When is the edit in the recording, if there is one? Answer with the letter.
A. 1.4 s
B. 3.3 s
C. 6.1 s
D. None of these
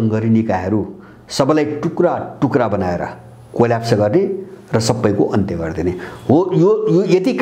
D